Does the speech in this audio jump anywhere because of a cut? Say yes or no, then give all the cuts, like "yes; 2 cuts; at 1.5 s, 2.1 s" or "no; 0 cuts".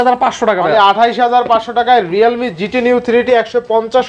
no; 0 cuts